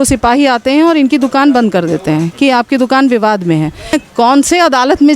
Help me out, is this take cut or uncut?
cut